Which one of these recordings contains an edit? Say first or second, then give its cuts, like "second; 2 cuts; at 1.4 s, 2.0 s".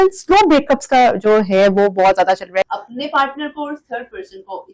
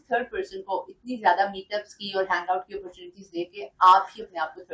first; 1 cut; at 2.7 s